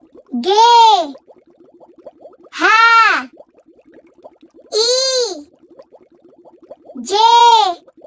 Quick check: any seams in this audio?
no; 0 cuts

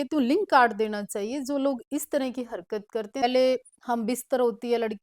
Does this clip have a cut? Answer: yes; 1 cut; at 3.2 s

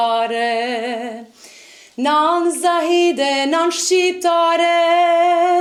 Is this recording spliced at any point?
no; 0 cuts

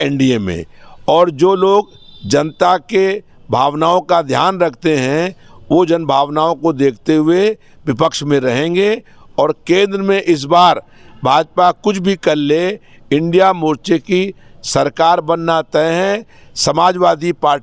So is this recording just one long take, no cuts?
yes; 0 cuts

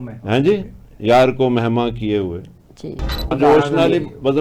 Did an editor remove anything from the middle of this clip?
yes; 1 cut; at 3.3 s

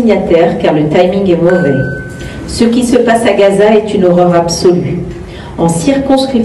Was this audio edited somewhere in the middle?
no; 0 cuts

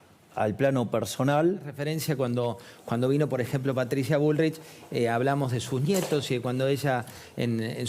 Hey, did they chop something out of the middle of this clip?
yes; 1 cut; at 1.8 s

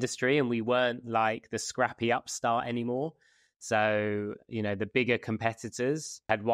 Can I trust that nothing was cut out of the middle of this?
yes; 0 cuts

